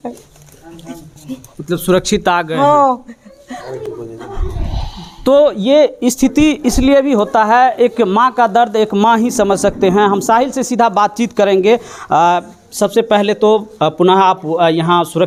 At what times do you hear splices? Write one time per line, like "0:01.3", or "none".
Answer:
none